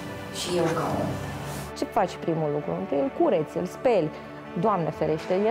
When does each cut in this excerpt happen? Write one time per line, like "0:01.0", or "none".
0:01.6

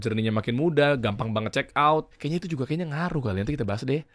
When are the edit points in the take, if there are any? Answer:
0:02.1

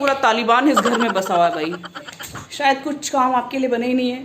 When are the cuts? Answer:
0:02.4

